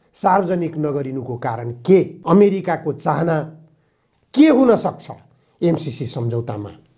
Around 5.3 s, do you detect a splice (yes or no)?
no